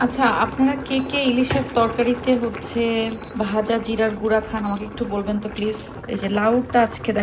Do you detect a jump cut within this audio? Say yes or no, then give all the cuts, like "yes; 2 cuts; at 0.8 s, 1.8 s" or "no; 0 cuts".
yes; 2 cuts; at 3.2 s, 5.9 s